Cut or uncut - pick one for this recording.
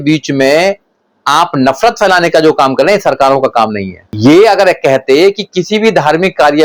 cut